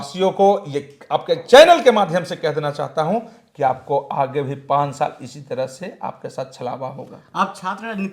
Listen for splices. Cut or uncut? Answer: uncut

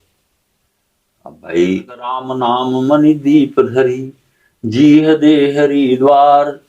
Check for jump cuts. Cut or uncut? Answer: cut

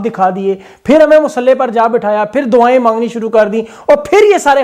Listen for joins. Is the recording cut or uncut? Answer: uncut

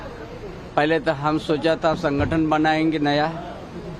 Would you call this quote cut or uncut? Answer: uncut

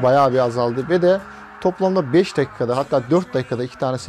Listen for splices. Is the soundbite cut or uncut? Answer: uncut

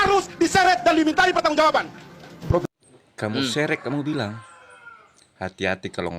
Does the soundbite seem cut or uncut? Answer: uncut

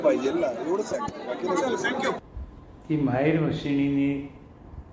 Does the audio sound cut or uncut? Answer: cut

